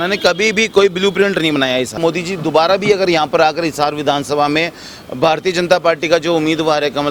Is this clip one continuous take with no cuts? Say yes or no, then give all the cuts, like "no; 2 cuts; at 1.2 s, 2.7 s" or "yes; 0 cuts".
no; 1 cut; at 2.0 s